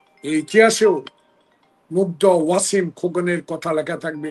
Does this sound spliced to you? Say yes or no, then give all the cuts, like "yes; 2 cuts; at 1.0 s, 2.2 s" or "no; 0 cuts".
no; 0 cuts